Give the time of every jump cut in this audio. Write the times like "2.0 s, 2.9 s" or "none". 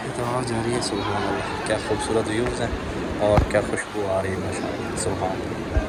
none